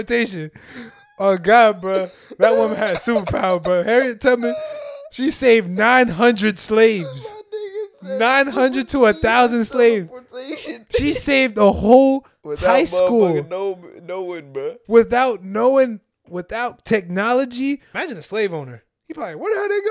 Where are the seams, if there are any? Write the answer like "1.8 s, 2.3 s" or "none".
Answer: 17.9 s